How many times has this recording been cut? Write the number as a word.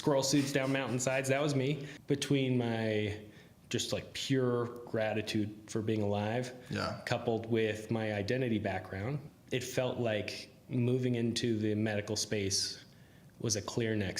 two